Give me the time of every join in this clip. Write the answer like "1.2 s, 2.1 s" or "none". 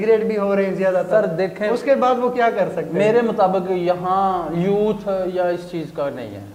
none